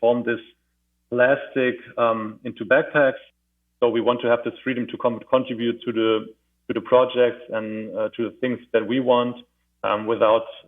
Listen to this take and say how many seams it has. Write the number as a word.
one